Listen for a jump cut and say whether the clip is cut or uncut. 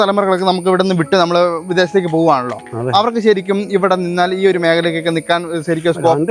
uncut